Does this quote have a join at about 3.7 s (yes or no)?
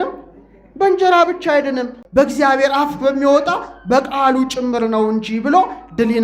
no